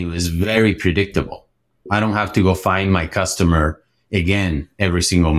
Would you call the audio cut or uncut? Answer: cut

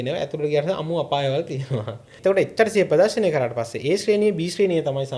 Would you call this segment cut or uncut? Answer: cut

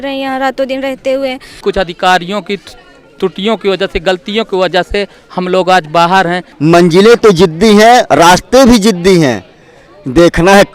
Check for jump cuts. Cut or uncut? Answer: cut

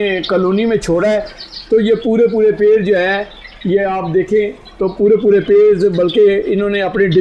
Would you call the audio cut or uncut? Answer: uncut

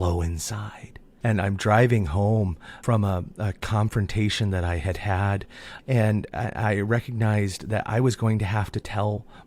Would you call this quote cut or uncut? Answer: cut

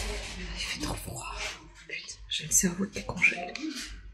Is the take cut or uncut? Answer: uncut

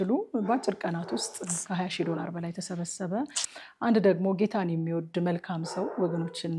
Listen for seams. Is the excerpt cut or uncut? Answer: cut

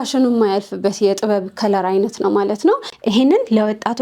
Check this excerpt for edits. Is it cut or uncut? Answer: cut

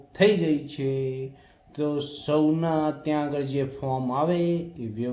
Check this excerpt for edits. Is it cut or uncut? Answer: cut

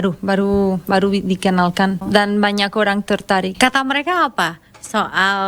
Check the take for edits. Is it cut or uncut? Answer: cut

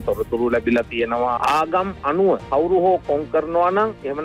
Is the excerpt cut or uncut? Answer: uncut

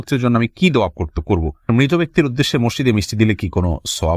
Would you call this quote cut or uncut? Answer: cut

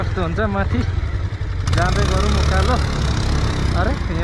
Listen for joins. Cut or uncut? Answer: uncut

